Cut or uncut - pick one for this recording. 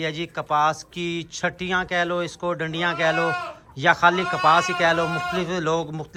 uncut